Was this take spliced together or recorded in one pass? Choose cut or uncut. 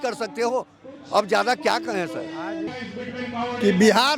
cut